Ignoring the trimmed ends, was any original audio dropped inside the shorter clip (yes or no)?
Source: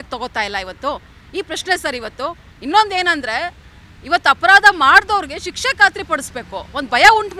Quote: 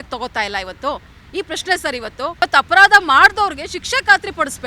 yes